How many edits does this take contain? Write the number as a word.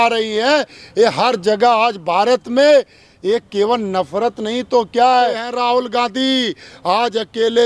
one